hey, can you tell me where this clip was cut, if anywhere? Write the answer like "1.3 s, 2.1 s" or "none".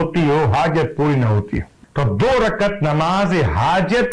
1.8 s

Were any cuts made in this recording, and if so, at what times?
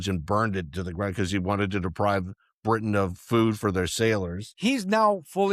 4.4 s

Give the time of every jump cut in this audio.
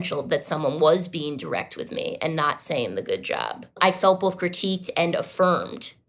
3.8 s

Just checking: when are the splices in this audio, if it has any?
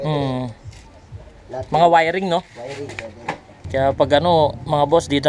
3.5 s

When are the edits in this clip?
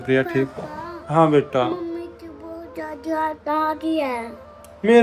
none

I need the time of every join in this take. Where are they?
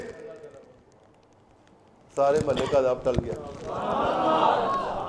none

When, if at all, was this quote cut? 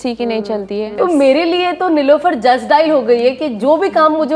0.9 s

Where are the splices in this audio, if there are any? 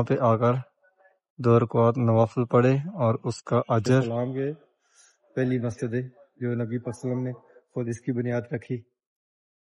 4.0 s

